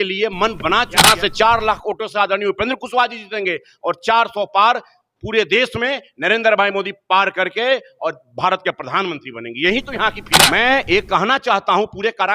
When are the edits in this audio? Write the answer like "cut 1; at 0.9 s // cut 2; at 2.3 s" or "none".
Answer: cut 1; at 0.9 s // cut 2; at 10.3 s